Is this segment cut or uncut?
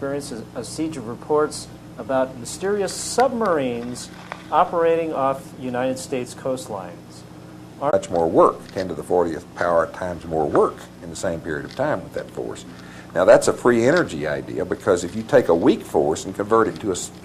uncut